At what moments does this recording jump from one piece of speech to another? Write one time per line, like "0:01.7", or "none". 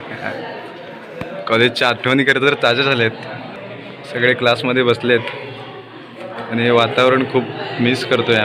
0:03.5